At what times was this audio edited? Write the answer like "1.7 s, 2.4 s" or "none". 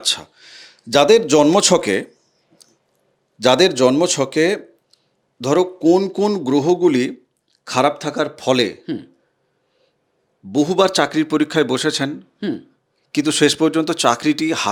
none

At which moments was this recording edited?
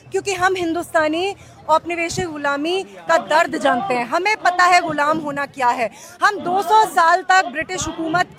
none

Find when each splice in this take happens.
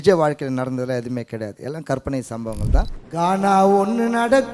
3.0 s

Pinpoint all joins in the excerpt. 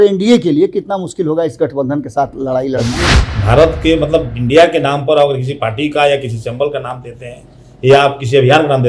3.1 s

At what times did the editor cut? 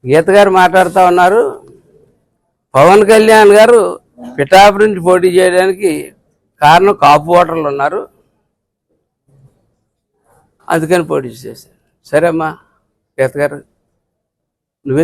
none

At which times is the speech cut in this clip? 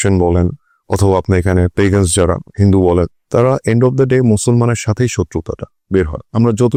none

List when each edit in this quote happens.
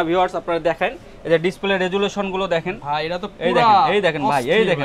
none

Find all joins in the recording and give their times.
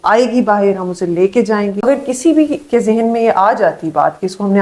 1.8 s

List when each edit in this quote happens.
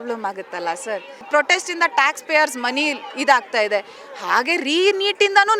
1.1 s

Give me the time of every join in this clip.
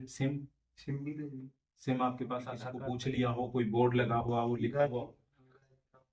3.1 s

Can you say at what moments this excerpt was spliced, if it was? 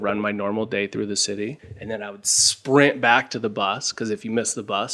none

